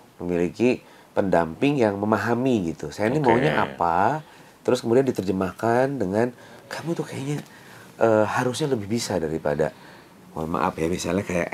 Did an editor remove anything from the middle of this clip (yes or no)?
no